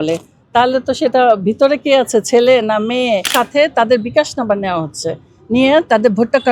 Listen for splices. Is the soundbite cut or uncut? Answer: cut